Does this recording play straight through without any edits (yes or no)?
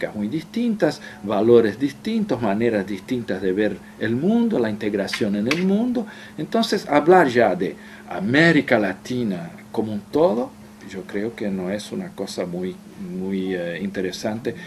no